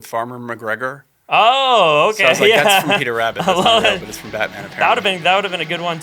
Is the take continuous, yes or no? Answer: yes